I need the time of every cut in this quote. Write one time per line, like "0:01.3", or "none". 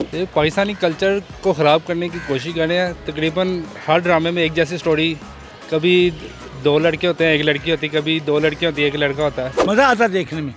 0:09.6

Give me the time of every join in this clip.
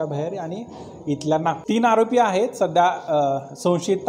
0:01.6

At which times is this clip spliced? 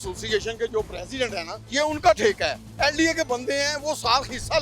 0:01.6
0:02.6

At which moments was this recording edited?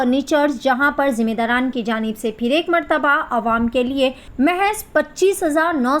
0:04.2

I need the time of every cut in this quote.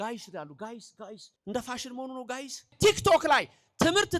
0:01.3
0:02.7

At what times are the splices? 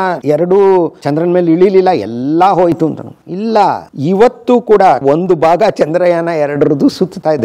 0:03.8
0:05.0

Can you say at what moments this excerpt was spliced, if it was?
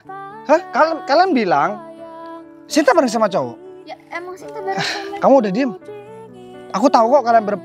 none

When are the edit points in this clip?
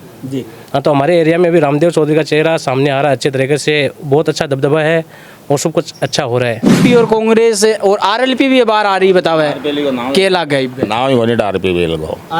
0:06.8

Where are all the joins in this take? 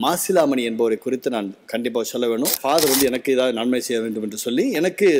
0:02.6

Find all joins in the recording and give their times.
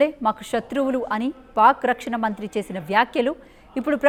none

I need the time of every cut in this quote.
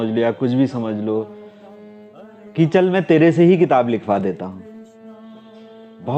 none

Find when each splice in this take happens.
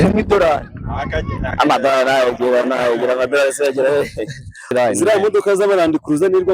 0:04.7

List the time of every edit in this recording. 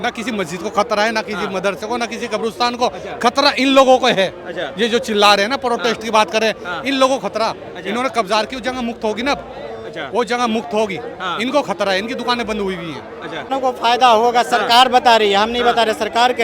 0:13.5

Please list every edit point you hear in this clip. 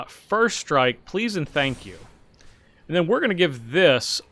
none

